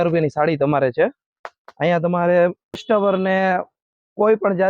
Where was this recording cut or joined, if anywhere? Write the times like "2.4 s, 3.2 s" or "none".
2.8 s